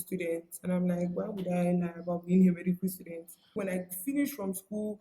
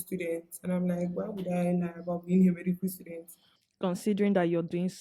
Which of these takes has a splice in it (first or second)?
first